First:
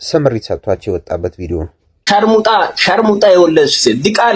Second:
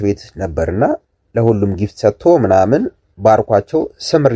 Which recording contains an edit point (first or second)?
first